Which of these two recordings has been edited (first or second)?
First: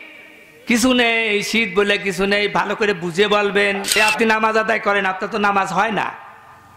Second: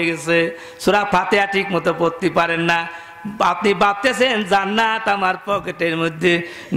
first